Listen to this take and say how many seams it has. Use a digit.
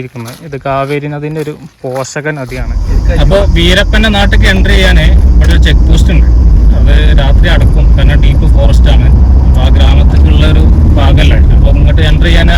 1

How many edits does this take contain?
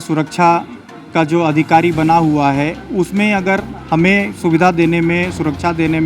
0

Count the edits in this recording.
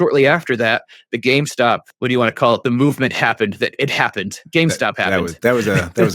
1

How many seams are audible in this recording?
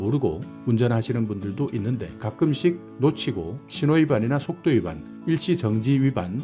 2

